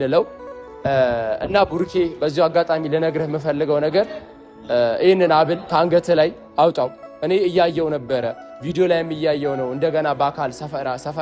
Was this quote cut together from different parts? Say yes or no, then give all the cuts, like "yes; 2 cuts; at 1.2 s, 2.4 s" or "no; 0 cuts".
no; 0 cuts